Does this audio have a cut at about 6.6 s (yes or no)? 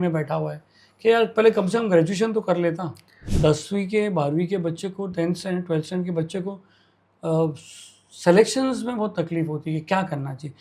no